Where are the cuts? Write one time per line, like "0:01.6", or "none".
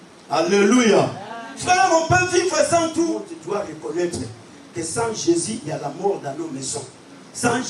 0:03.2